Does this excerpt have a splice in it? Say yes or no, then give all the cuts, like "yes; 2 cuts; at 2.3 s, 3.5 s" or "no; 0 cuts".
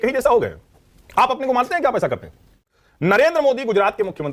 yes; 2 cuts; at 1.0 s, 2.5 s